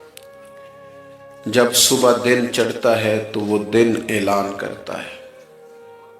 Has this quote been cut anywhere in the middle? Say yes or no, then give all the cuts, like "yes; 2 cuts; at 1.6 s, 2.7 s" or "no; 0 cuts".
yes; 1 cut; at 5.1 s